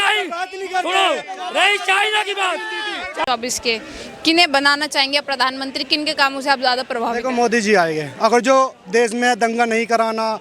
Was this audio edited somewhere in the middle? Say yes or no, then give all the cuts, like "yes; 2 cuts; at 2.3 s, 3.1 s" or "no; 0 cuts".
yes; 1 cut; at 3.2 s